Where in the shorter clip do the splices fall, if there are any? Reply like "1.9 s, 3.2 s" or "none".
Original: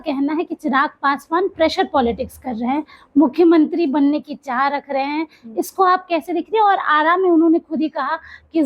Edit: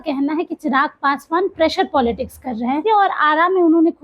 2.8 s